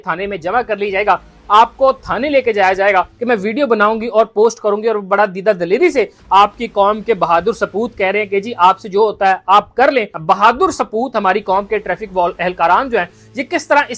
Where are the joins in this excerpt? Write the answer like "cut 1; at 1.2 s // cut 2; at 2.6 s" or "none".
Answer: cut 1; at 3.2 s // cut 2; at 10.1 s